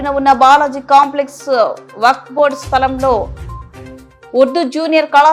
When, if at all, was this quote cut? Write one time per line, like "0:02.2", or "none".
none